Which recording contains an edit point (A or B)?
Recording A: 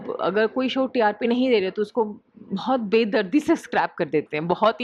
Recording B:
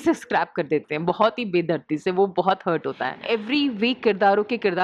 B